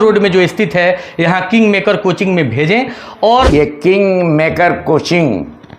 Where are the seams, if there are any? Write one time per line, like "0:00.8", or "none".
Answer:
0:03.5